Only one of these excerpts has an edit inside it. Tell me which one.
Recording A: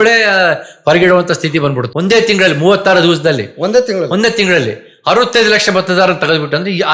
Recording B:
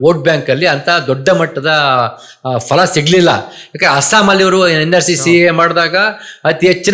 A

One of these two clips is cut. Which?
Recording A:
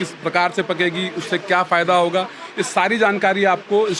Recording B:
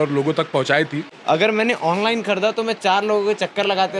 B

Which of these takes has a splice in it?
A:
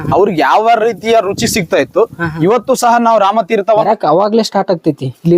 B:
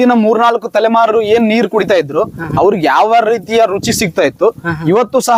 A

